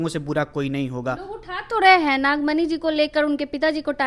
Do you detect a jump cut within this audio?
no; 0 cuts

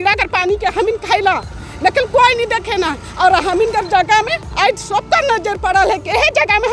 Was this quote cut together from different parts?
no; 0 cuts

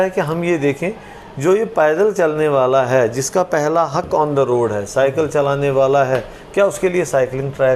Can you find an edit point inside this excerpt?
no; 0 cuts

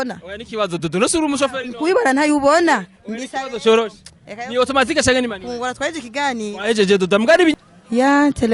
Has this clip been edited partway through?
yes; 1 cut; at 7.5 s

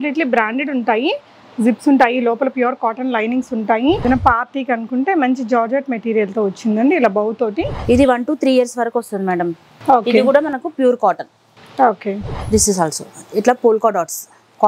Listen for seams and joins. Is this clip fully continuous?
no; 2 cuts; at 4.0 s, 7.7 s

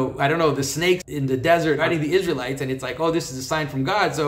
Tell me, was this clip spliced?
yes; 2 cuts; at 1.0 s, 1.8 s

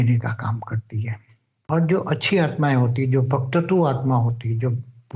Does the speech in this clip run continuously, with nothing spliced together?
no; 1 cut; at 1.7 s

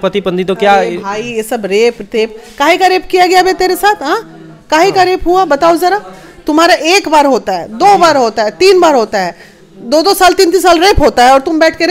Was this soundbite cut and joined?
no; 0 cuts

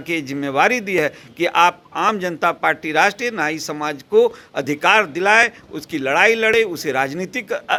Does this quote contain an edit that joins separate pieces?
no; 0 cuts

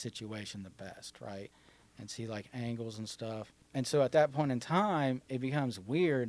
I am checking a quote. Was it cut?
yes; 1 cut; at 3.6 s

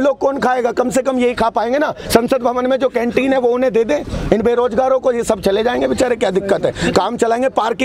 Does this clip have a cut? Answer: no; 0 cuts

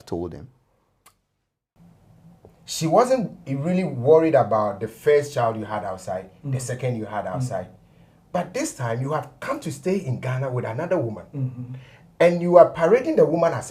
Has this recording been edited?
yes; 1 cut; at 1.5 s

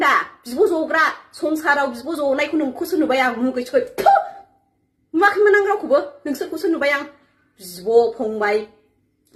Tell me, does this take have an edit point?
no; 0 cuts

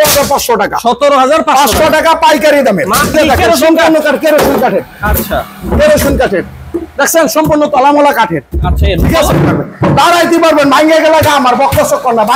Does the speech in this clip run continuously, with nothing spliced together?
no; 2 cuts; at 3.1 s, 9.3 s

